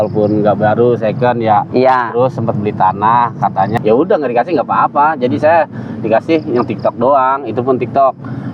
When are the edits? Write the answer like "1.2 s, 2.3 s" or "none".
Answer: 3.7 s